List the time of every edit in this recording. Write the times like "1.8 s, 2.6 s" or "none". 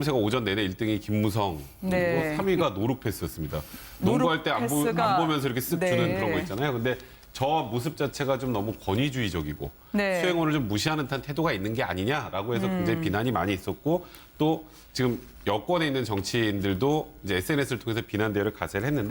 2.6 s